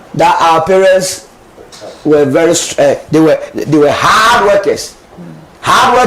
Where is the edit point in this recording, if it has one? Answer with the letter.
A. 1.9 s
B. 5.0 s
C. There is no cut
C